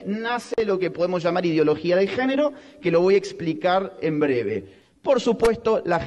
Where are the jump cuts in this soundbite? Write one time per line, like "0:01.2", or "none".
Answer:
0:04.7

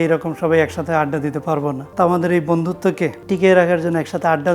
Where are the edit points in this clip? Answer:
0:01.8
0:03.2

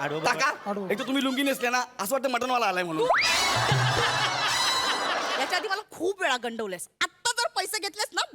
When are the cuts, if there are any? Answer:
0:05.4

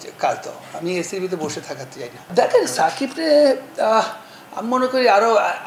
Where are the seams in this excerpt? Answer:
0:02.2

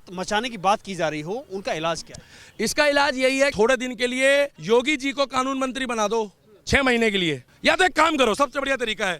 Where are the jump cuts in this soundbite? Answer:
0:03.5
0:04.6
0:07.5

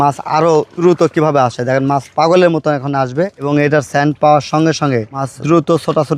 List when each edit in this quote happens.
none

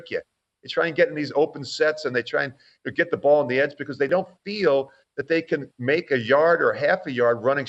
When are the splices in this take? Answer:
0:04.1

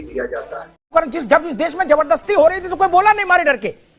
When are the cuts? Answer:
0:00.9

